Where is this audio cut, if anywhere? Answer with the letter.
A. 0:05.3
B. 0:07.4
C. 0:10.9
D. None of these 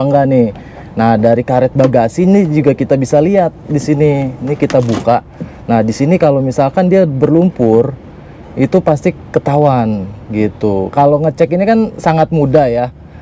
C